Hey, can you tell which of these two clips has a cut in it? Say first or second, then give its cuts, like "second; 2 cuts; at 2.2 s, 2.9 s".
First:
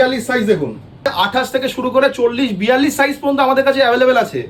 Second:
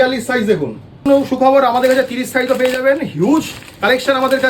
second; 1 cut; at 1.0 s